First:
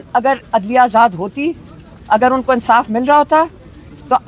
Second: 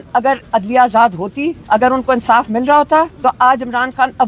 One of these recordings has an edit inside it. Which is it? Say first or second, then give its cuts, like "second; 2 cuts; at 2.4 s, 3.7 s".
second; 2 cuts; at 1.6 s, 3.1 s